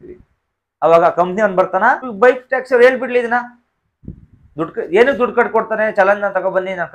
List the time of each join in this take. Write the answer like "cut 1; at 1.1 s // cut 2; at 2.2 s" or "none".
cut 1; at 2.1 s

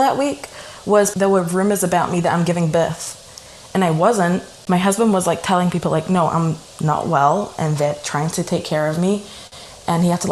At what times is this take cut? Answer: cut 1; at 1.1 s // cut 2; at 4.5 s

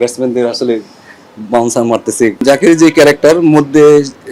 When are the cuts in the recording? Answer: cut 1; at 2.4 s

